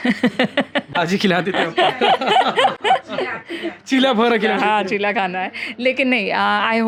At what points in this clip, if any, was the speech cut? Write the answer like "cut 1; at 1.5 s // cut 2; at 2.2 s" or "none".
none